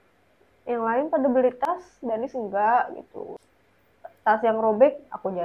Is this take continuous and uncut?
no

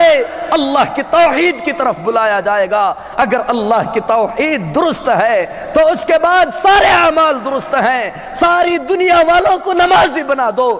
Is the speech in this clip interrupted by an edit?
no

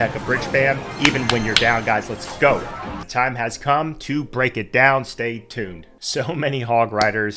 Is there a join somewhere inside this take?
no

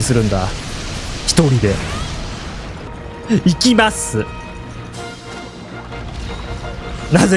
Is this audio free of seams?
no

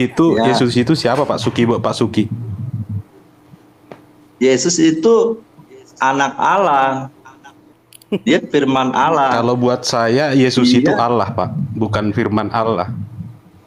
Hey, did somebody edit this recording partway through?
no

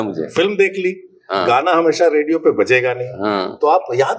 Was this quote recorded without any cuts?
yes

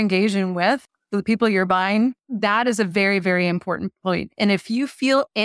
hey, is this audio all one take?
no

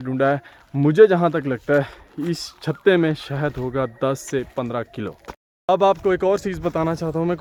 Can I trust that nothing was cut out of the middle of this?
yes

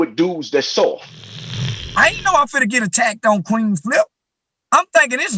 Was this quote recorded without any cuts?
no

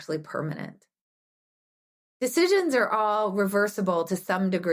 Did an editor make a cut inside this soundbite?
no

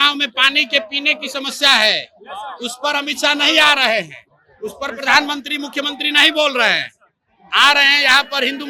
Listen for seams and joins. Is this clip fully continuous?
yes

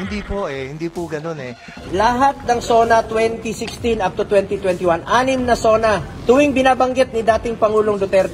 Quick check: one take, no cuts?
no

